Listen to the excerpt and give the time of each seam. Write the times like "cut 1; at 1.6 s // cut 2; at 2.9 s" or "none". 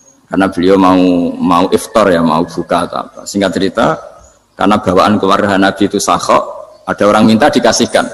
none

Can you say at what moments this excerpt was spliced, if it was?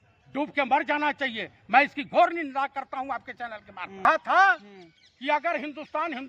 cut 1; at 4.0 s

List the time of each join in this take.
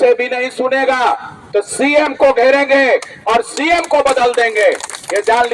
none

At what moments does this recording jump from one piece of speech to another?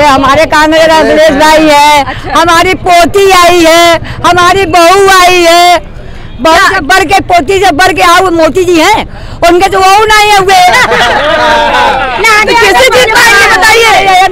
none

